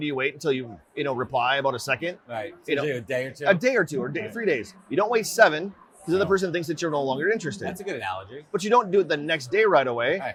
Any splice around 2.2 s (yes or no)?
no